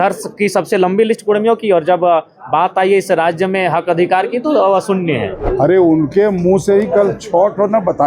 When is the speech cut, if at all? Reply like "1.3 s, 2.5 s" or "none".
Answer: 5.5 s

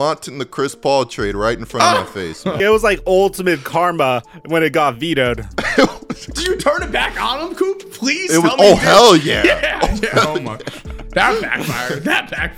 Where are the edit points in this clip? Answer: 2.6 s

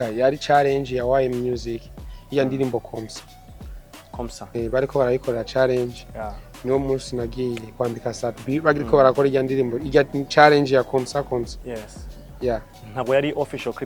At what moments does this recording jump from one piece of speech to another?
none

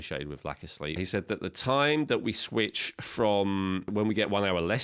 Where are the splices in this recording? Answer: 1.0 s, 3.9 s

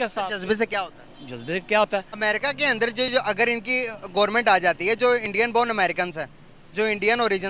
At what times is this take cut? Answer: 2.1 s

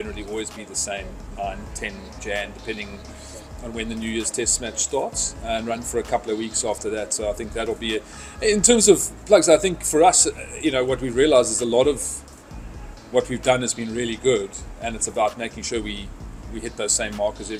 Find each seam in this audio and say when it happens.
none

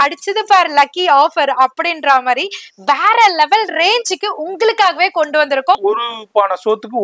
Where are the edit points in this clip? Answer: 5.8 s

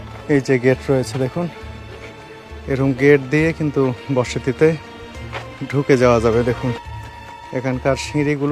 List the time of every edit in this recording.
6.9 s

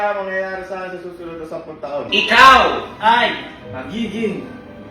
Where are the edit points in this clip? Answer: 2.1 s

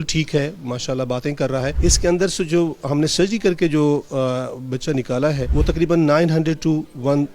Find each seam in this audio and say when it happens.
1.8 s, 5.4 s

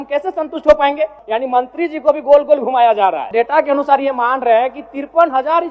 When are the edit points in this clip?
1.2 s, 3.3 s

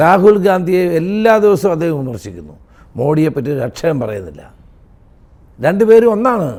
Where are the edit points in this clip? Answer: none

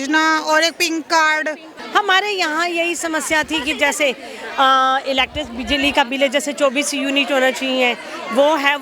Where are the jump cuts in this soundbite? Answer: 1.7 s

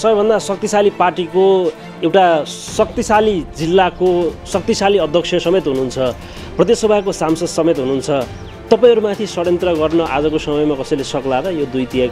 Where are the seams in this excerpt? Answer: none

